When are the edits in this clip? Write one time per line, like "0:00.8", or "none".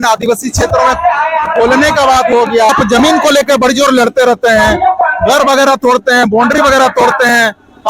0:02.7